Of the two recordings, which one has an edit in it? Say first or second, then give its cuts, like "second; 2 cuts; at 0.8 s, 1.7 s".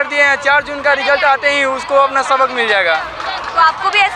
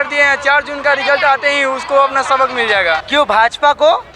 second; 1 cut; at 3.0 s